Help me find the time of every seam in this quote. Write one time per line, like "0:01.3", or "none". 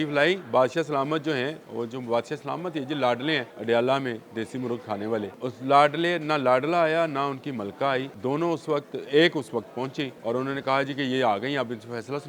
0:03.5
0:05.3
0:08.1
0:10.1